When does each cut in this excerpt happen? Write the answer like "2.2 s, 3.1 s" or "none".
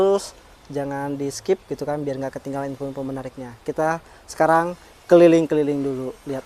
none